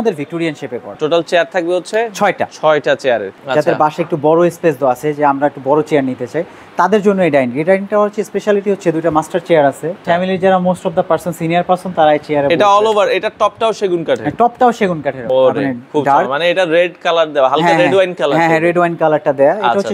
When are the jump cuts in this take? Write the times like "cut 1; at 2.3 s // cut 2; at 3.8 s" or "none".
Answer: cut 1; at 1.0 s // cut 2; at 3.3 s // cut 3; at 10.0 s // cut 4; at 15.3 s